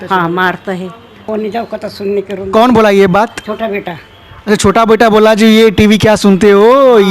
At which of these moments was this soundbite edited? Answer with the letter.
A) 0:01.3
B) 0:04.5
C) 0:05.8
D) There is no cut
A